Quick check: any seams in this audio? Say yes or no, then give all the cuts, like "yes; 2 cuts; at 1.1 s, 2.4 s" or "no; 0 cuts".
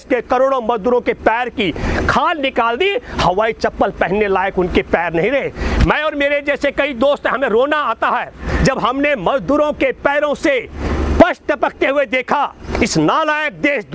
no; 0 cuts